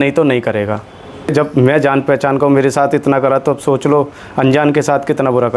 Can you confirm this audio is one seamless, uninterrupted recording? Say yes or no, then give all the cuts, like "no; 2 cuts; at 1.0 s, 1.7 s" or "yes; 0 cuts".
no; 1 cut; at 1.3 s